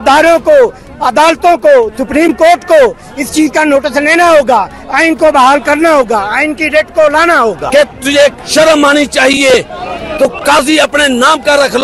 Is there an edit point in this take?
yes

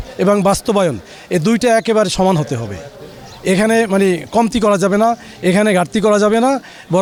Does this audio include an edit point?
no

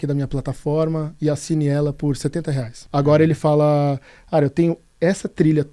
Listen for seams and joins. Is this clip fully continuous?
no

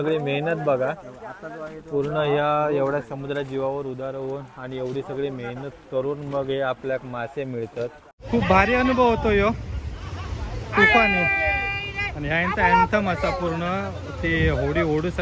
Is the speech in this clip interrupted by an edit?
yes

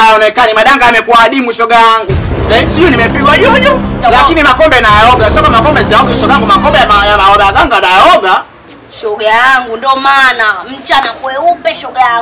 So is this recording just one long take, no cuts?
yes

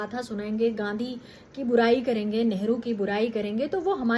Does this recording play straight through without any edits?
yes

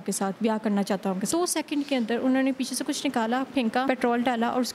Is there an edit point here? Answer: yes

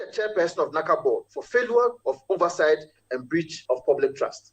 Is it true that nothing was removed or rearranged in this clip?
no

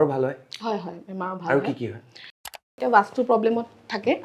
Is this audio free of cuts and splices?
no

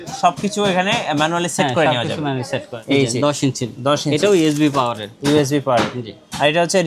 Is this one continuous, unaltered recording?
no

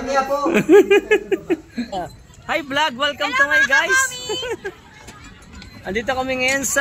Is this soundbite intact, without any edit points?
no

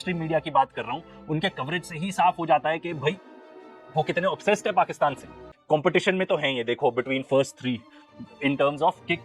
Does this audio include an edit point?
yes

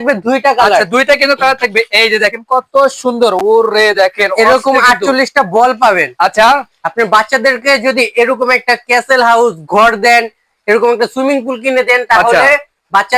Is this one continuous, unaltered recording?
yes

